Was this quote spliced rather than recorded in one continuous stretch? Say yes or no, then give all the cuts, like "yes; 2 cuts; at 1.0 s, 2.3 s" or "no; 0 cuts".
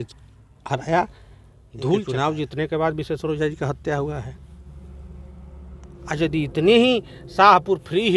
yes; 2 cuts; at 2.2 s, 5.9 s